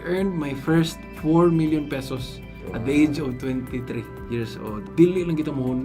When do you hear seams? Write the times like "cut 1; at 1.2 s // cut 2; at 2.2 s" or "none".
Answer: cut 1; at 4.8 s